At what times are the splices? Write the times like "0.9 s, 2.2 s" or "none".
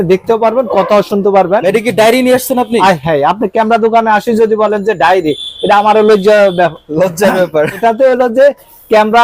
1.6 s, 7.8 s

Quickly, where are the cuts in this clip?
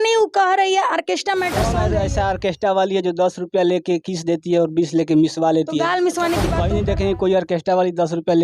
1.8 s, 6.6 s

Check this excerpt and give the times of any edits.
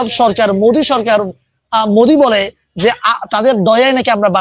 none

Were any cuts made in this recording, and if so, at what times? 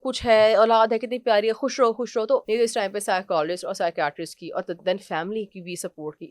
2.4 s

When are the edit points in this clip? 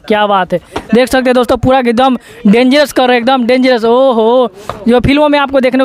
none

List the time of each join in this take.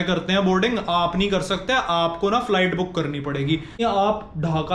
3.8 s

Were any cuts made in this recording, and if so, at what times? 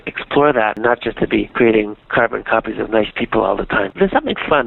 0.8 s, 2.1 s, 4.0 s

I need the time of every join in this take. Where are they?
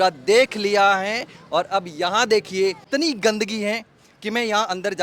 2.8 s

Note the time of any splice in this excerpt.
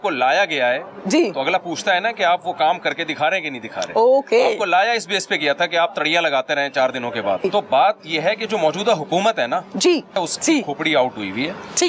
7.4 s, 10.2 s

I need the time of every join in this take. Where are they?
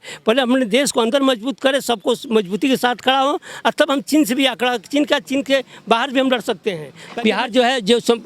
6.9 s

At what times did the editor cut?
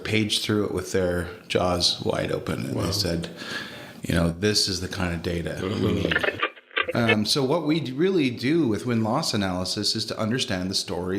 6.3 s

